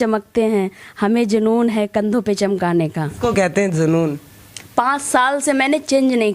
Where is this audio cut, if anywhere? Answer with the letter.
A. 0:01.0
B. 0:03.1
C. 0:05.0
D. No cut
B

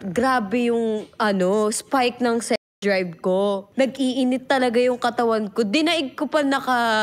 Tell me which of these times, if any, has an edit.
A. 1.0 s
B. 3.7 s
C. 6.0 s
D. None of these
B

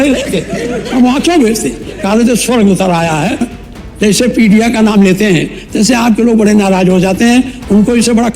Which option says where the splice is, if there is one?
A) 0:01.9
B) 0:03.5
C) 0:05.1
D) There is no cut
B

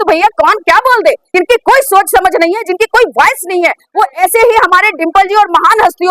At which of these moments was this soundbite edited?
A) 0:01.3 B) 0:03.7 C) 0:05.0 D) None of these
A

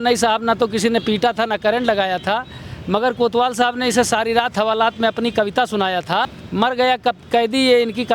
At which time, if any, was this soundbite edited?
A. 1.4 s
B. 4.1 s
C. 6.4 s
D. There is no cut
C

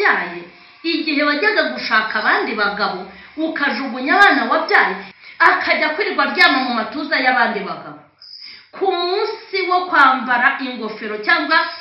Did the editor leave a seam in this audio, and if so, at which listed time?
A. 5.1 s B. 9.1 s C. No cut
A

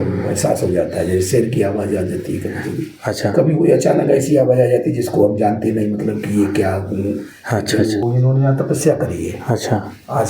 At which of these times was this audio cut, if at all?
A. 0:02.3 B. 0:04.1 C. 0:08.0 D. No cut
C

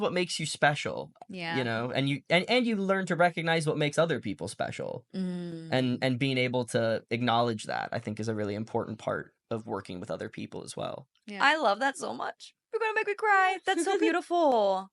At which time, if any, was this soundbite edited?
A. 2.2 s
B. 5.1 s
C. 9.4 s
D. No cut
D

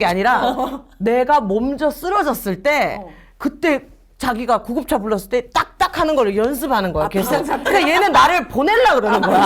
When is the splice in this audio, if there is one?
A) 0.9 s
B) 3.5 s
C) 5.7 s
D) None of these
D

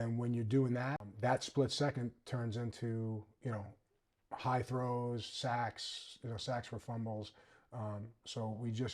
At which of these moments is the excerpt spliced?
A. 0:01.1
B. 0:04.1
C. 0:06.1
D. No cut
A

